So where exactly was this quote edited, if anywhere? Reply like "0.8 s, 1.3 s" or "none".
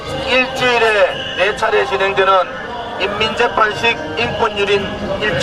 4.1 s